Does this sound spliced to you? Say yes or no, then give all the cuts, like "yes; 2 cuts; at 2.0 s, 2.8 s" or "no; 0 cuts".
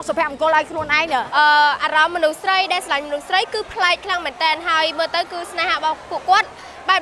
yes; 1 cut; at 1.3 s